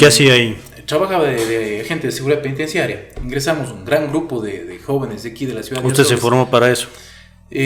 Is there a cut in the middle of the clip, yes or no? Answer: no